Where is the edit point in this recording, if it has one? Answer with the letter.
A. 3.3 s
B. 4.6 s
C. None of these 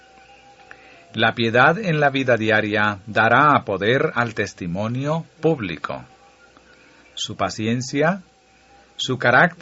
B